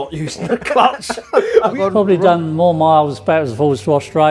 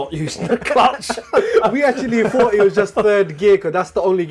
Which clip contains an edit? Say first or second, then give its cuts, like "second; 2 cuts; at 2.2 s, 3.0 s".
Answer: first; 1 cut; at 1.8 s